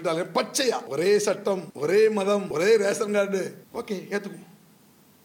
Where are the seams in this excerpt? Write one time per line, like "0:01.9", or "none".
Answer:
0:00.9
0:01.7
0:02.5
0:03.6